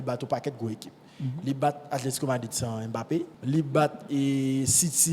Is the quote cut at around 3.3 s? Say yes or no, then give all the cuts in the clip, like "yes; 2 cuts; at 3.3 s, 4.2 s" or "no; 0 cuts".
yes; 1 cut; at 3.3 s